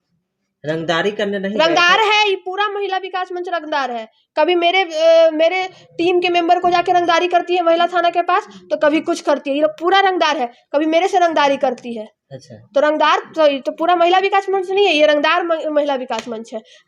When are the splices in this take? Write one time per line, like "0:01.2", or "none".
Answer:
none